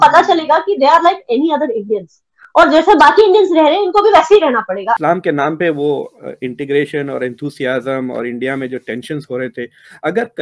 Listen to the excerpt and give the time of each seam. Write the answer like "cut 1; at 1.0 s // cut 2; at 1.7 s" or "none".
cut 1; at 5.0 s